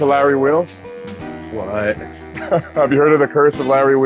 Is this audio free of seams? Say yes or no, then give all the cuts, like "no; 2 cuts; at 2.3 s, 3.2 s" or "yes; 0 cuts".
yes; 0 cuts